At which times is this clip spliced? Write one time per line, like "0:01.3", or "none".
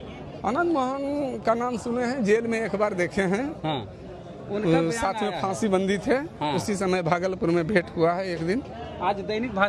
none